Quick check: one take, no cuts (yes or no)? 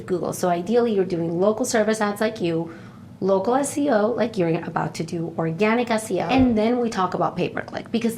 no